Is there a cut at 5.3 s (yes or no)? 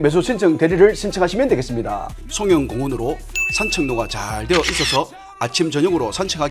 no